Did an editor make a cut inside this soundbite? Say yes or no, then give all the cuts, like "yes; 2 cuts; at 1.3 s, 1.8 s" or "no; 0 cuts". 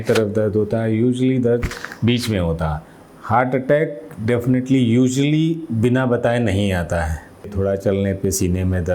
yes; 2 cuts; at 2.9 s, 7.5 s